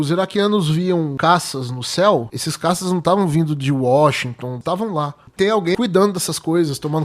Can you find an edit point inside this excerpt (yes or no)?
yes